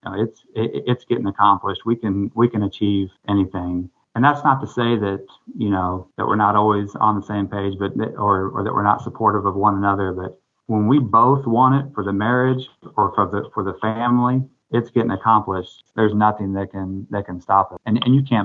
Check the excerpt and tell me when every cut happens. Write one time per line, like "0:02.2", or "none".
0:15.8